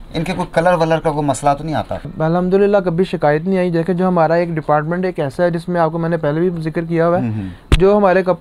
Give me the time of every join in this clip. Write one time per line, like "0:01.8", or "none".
0:02.1

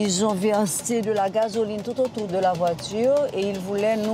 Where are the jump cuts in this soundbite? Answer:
0:02.2

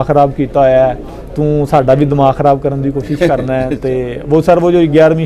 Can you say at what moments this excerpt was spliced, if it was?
none

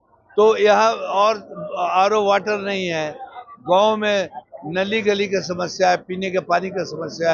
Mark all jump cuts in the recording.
none

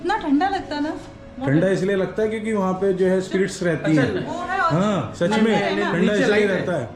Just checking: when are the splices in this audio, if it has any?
none

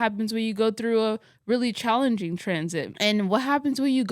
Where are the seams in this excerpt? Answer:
0:02.9

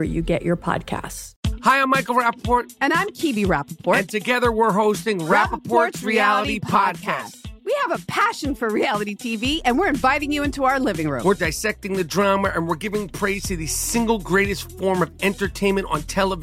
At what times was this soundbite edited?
0:01.2

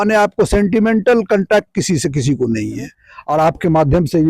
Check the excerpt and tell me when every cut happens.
0:03.1

